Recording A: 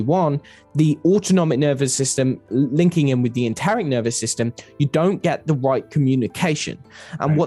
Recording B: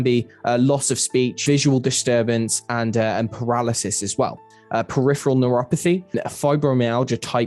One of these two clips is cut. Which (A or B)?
B